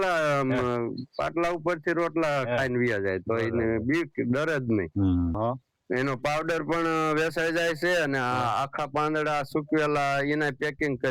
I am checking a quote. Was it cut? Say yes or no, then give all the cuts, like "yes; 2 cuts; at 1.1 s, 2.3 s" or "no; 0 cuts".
yes; 1 cut; at 5.4 s